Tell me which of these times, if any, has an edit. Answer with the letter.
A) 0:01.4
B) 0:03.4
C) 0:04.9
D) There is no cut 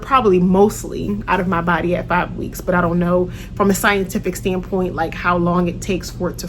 D